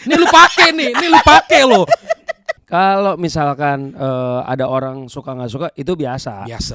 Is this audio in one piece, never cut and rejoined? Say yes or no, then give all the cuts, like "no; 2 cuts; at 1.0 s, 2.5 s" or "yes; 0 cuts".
no; 1 cut; at 2.5 s